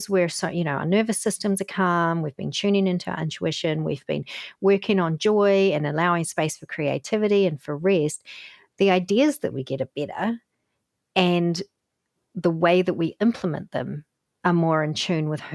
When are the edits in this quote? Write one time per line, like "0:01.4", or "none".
none